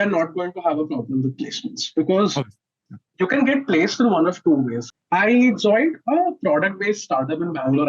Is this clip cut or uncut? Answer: cut